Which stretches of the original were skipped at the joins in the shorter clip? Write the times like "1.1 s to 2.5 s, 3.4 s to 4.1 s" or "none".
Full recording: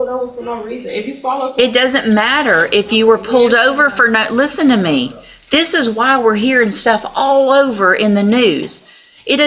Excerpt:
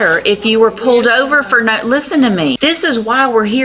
5.0 s to 5.5 s